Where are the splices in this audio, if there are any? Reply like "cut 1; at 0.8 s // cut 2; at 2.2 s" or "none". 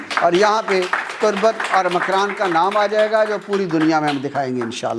none